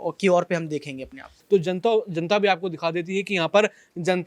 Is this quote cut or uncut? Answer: cut